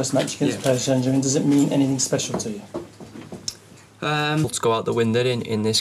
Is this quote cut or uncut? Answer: uncut